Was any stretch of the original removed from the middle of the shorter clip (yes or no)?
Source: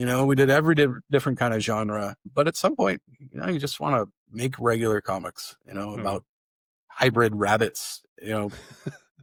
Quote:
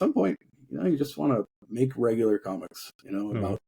no